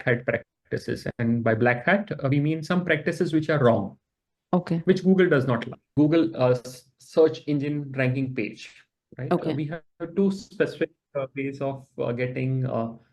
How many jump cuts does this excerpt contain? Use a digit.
1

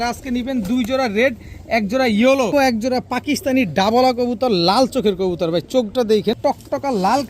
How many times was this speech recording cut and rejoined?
2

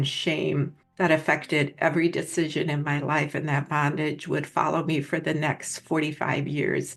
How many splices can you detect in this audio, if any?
0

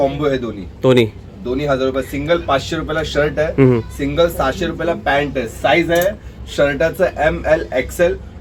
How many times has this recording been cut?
0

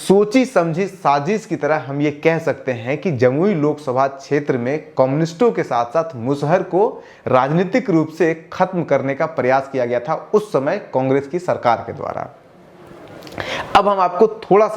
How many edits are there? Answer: 0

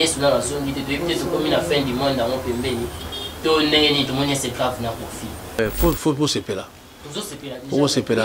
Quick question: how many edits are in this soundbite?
1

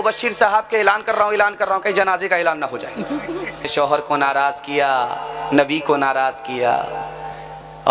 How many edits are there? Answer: 1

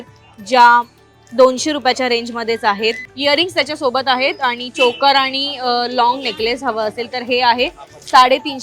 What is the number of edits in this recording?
1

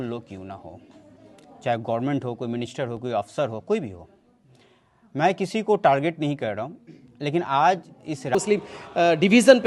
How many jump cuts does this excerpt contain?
1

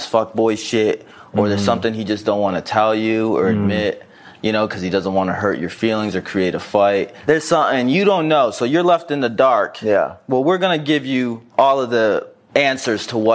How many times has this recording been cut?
3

